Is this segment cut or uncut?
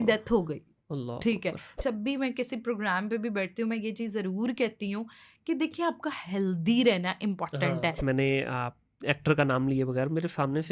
cut